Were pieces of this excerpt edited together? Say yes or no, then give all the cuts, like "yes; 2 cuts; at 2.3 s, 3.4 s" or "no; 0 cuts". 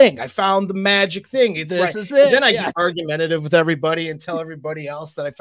no; 0 cuts